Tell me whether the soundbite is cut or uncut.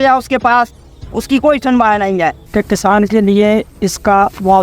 cut